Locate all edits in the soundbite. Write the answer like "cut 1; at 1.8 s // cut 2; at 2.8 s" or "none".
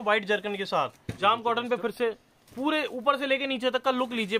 cut 1; at 1.0 s